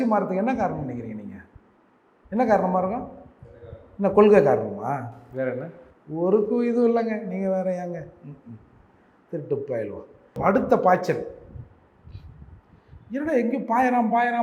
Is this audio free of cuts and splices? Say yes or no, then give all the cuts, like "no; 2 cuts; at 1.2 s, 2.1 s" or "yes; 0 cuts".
no; 1 cut; at 10.4 s